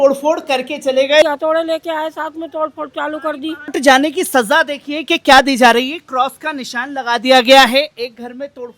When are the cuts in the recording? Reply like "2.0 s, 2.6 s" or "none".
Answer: 1.2 s, 3.7 s